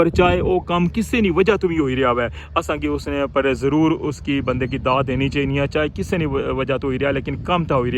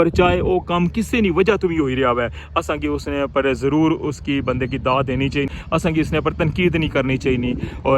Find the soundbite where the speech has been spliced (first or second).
second